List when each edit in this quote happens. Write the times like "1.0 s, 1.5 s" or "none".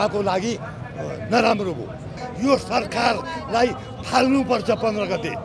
2.2 s